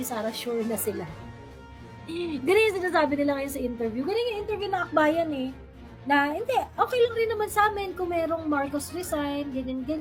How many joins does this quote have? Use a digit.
0